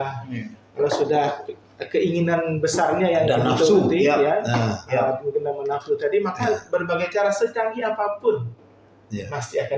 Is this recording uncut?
yes; 0 cuts

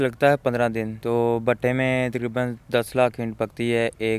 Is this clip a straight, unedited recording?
no; 1 cut; at 0.9 s

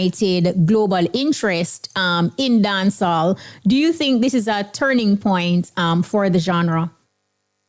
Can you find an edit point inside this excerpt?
no; 0 cuts

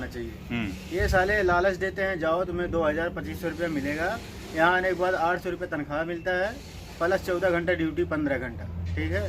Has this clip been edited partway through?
no; 0 cuts

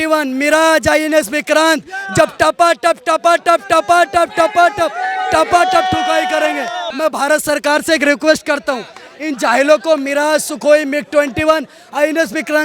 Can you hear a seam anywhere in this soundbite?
yes; 1 cut; at 6.8 s

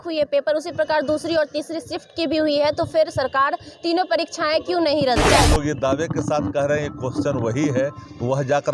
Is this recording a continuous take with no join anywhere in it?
no; 1 cut; at 5.3 s

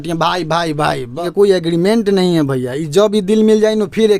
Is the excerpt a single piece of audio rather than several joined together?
no; 1 cut; at 1.2 s

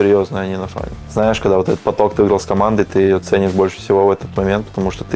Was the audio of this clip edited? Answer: yes; 1 cut; at 1.0 s

